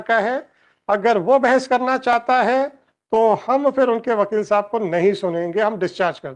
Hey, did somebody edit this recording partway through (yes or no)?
no